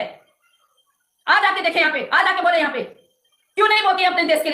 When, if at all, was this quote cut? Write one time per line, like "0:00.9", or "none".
none

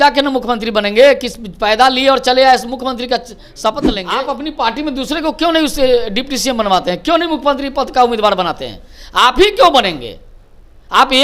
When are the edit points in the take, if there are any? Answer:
0:04.2

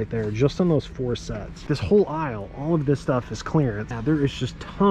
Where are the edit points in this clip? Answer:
0:01.6
0:04.0

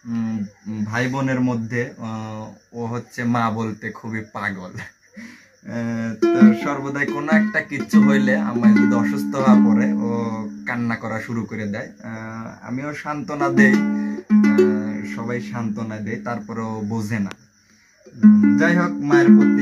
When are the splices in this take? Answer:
none

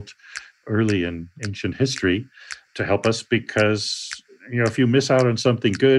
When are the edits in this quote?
0:01.4

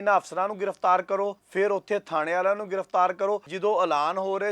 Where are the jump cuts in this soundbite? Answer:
0:01.4
0:03.5

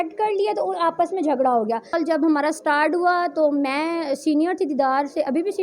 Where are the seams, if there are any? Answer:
0:01.9

